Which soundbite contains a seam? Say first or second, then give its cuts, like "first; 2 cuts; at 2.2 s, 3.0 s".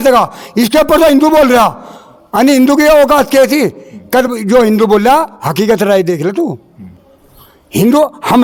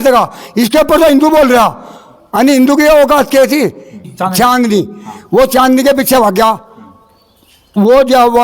second; 1 cut; at 3.9 s